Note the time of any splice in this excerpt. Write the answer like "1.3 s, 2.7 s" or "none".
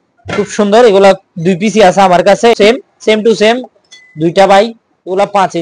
2.5 s